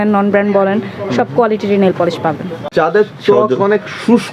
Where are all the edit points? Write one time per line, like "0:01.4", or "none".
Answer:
0:02.7